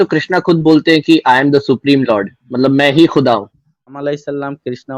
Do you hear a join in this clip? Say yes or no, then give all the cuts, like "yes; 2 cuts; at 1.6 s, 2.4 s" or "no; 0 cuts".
yes; 1 cut; at 3.7 s